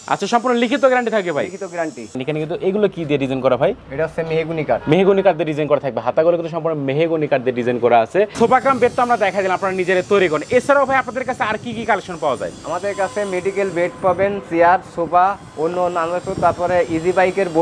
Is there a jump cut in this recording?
yes; 3 cuts; at 2.2 s, 3.9 s, 8.3 s

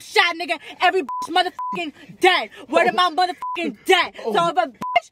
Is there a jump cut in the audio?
no; 0 cuts

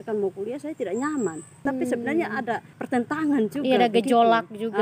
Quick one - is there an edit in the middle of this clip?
yes; 2 cuts; at 1.6 s, 2.7 s

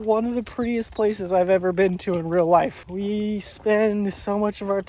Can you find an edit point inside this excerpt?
yes; 1 cut; at 2.8 s

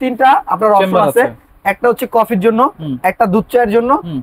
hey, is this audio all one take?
yes; 0 cuts

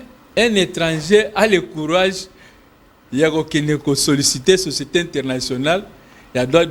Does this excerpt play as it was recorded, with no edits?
yes; 0 cuts

